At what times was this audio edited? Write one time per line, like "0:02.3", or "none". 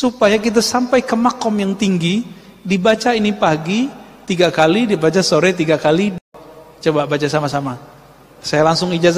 0:06.2